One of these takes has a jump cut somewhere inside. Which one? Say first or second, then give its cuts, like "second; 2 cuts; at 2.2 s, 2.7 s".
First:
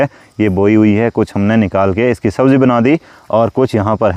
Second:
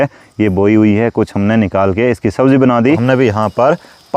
second; 1 cut; at 3.0 s